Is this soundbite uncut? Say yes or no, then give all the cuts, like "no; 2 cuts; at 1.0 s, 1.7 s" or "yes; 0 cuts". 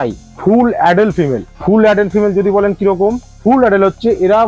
no; 1 cut; at 3.3 s